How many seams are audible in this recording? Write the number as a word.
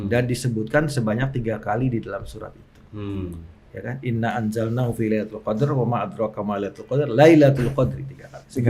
zero